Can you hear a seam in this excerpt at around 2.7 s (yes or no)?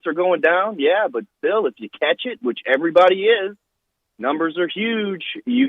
yes